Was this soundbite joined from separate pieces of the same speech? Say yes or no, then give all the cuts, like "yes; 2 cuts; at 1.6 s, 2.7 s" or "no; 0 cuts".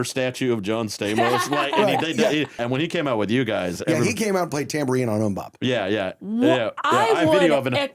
yes; 1 cut; at 2.6 s